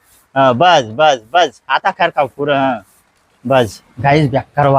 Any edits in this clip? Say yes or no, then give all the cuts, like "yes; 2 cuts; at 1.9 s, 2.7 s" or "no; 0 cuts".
yes; 1 cut; at 3.9 s